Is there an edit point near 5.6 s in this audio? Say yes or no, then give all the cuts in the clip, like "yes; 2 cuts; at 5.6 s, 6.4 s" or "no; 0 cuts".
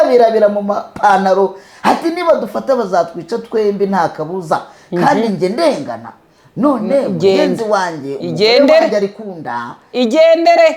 no; 0 cuts